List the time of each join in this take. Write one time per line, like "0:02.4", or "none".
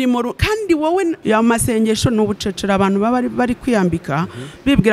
0:01.2